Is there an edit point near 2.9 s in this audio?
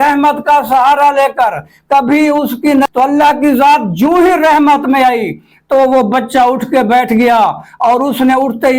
yes; 1 cut; at 2.9 s

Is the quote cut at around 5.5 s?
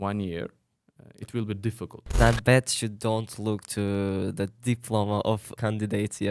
yes; 2 cuts; at 2.2 s, 5.5 s

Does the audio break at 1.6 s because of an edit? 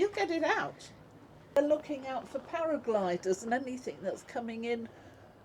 yes; 1 cut; at 1.6 s

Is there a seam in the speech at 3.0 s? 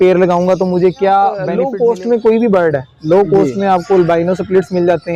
no; 1 cut; at 1.5 s

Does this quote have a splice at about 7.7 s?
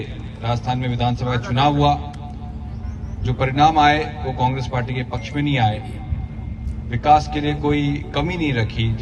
no; 0 cuts

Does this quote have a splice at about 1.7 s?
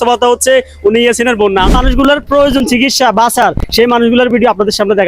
yes; 1 cut; at 1.7 s

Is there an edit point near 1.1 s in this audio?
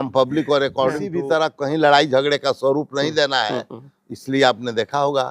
yes; 1 cut; at 1.1 s

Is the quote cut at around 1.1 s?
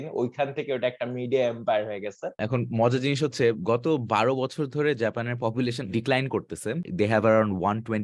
no; 3 cuts; at 2.4 s, 5.8 s, 6.9 s

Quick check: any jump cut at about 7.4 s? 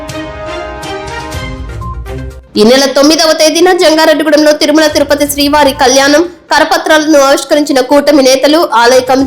no; 1 cut; at 2.3 s

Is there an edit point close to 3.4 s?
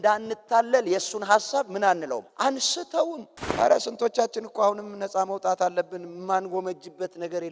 yes; 1 cut; at 3.4 s

